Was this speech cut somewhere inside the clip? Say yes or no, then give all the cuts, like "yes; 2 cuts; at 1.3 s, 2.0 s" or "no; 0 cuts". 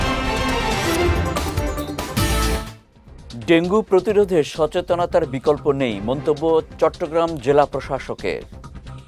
yes; 1 cut; at 0.9 s